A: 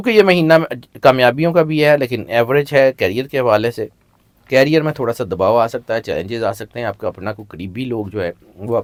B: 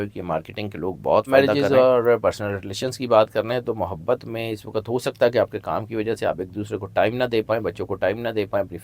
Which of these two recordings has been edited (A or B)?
B